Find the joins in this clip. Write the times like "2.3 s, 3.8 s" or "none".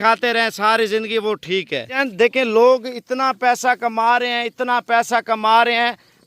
2.0 s